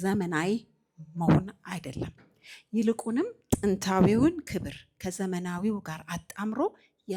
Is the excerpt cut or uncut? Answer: uncut